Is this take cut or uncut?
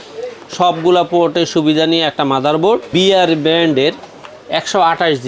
cut